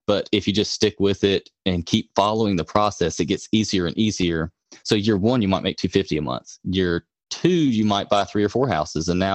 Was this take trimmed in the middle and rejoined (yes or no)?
no